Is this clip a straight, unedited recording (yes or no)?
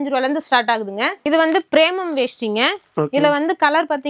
no